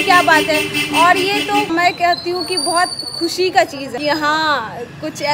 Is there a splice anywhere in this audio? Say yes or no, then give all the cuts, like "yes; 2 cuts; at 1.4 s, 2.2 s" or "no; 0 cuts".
yes; 2 cuts; at 1.7 s, 3.8 s